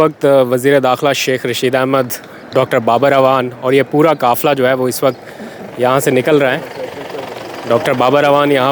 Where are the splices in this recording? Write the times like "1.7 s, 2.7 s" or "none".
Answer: none